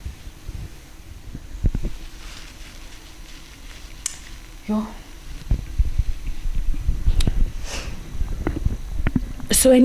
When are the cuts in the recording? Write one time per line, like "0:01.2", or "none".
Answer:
0:01.2